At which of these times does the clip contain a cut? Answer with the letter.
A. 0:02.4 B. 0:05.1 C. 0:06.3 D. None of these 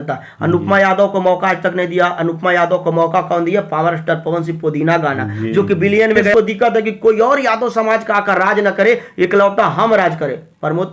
C